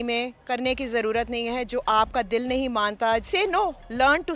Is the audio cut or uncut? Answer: cut